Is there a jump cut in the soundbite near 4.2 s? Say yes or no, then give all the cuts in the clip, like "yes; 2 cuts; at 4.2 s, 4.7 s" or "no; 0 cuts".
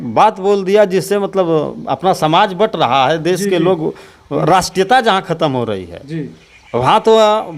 no; 0 cuts